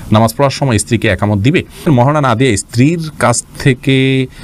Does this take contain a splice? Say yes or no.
yes